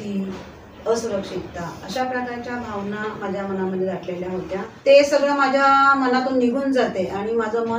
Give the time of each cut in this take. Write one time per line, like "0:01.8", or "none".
0:04.7